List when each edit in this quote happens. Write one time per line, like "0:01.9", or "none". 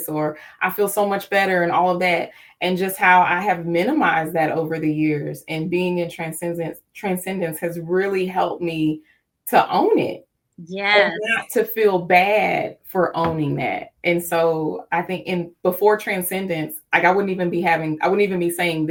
none